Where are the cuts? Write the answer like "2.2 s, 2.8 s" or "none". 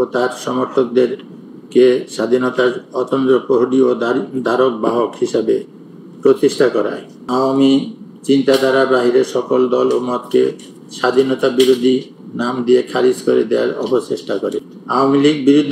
7.2 s, 14.7 s